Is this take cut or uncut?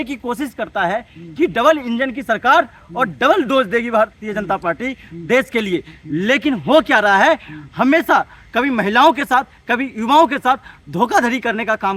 uncut